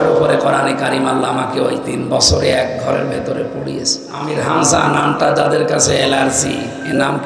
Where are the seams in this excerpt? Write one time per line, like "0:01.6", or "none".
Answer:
0:04.2